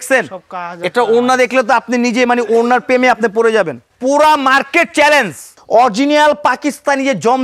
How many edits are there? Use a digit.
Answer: 2